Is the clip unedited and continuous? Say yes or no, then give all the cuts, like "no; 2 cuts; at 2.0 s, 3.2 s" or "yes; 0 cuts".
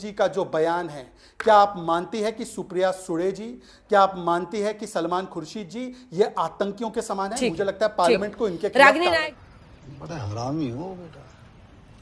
yes; 0 cuts